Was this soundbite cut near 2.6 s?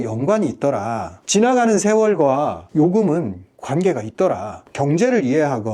no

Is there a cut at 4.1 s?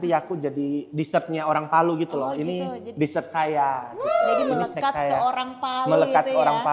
no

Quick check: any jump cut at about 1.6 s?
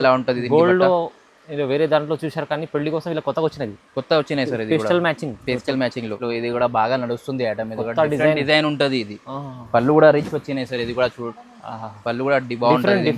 no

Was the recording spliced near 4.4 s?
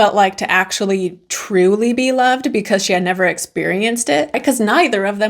yes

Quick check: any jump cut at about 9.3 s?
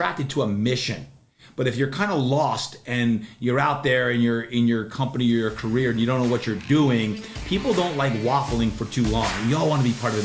yes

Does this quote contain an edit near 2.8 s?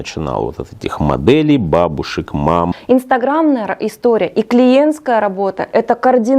yes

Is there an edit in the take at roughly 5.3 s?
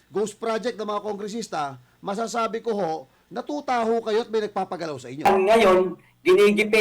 yes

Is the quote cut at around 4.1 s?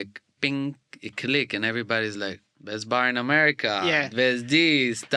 no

